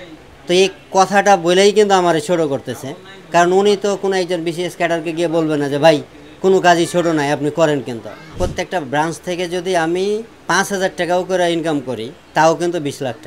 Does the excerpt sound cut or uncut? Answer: cut